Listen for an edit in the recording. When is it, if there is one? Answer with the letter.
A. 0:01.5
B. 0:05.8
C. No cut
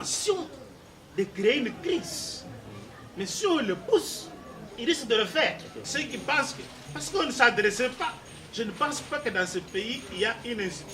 B